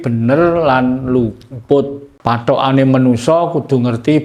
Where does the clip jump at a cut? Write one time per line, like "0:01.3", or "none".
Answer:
0:02.1